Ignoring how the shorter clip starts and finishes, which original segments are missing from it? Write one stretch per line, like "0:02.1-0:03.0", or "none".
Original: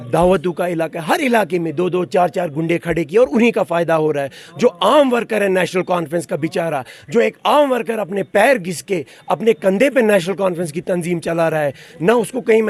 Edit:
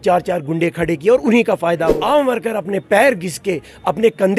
0:04.0-0:07.4